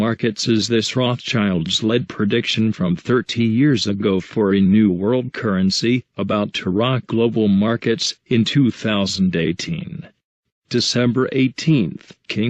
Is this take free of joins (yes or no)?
yes